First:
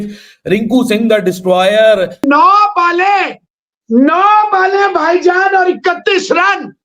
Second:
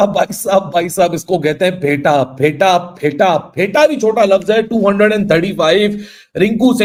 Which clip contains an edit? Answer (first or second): first